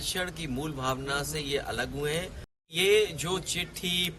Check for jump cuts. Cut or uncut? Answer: cut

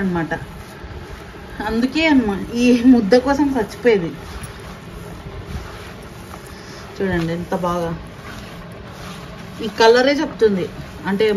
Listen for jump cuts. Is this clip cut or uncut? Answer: uncut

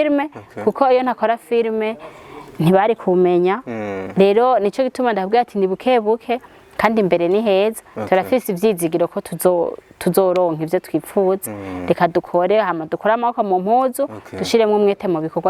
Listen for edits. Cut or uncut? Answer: uncut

